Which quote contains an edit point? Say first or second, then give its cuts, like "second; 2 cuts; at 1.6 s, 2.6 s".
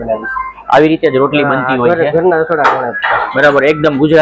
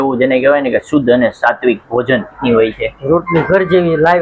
second; 1 cut; at 2.4 s